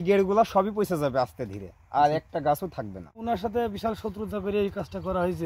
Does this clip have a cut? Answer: yes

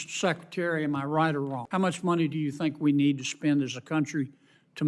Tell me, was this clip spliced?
yes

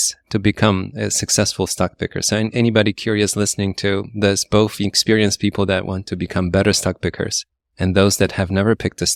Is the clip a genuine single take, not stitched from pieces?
yes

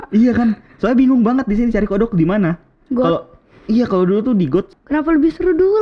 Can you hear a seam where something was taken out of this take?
yes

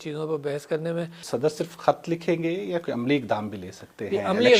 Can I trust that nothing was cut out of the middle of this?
no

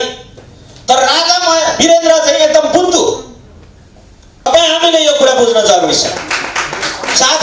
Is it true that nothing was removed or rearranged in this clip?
no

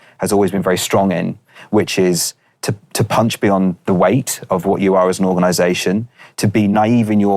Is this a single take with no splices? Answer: yes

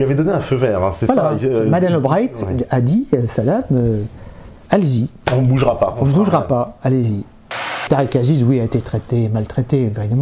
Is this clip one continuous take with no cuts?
no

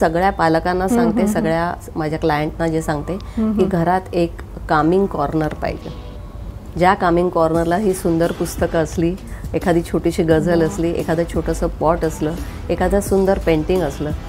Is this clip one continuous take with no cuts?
yes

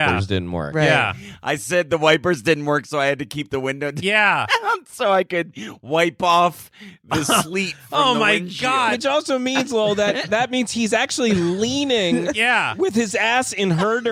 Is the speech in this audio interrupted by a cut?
no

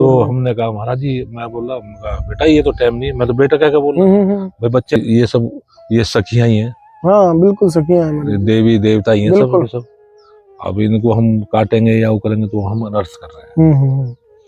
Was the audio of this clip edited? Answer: yes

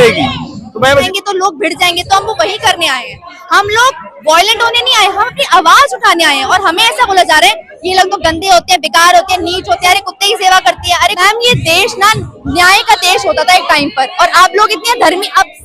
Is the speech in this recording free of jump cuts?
no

